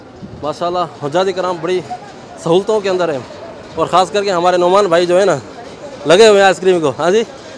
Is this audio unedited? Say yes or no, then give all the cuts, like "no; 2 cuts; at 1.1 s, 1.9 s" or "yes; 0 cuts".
yes; 0 cuts